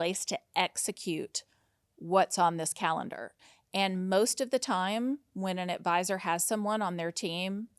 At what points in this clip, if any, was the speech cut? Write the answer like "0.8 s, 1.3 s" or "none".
3.4 s